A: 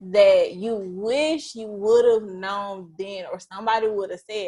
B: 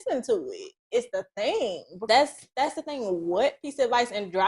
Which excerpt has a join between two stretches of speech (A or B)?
B